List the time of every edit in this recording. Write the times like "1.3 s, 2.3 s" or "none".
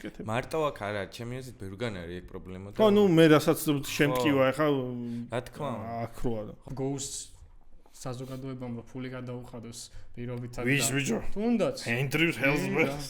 6.5 s